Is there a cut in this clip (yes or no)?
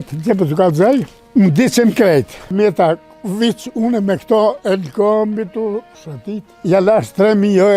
yes